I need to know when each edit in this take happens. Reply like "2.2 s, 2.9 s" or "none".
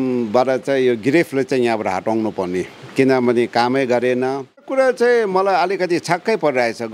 4.7 s